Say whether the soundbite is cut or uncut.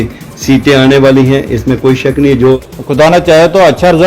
cut